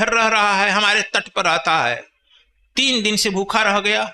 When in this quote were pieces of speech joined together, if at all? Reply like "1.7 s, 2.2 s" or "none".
none